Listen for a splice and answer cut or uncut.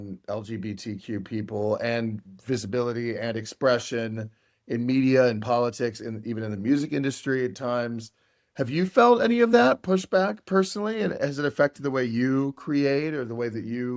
uncut